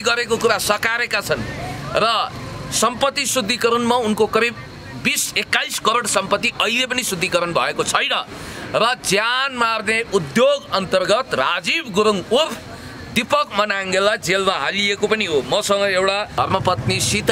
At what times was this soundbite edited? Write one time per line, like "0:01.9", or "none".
0:16.3

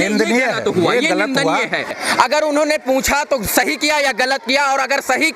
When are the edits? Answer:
0:01.9

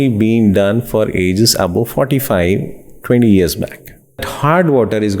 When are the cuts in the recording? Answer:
0:04.2

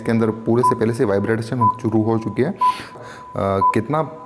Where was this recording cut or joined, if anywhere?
0:03.0

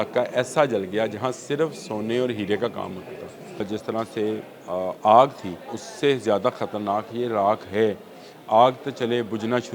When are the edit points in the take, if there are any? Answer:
0:03.6
0:05.8

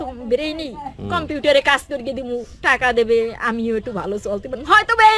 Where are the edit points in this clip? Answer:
none

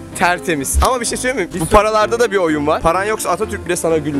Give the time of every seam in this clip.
none

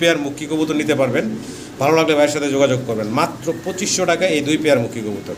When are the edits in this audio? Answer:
none

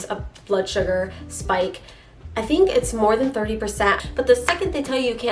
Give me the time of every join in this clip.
0:04.0

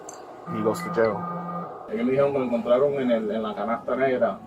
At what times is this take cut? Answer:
0:01.8

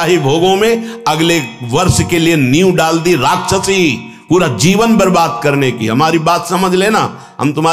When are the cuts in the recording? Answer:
none

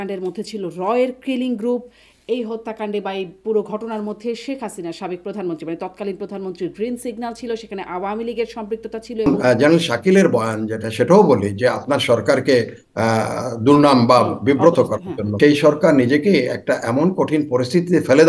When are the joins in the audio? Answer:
0:09.3
0:15.4

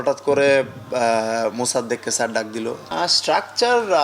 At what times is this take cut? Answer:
0:02.8

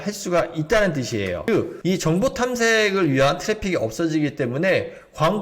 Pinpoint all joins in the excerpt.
0:01.5

